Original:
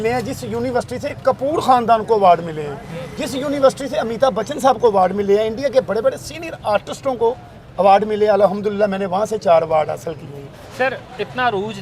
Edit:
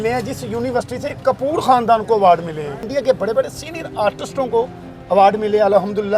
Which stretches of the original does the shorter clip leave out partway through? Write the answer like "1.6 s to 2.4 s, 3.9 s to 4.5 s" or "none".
2.9 s to 5.5 s